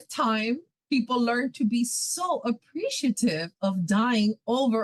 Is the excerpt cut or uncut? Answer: uncut